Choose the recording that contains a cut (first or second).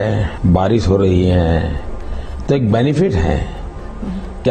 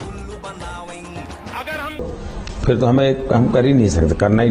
second